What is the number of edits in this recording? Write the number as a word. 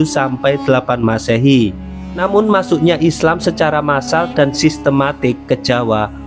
one